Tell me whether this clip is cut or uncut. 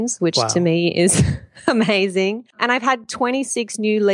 cut